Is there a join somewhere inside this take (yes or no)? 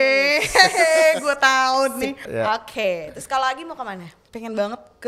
yes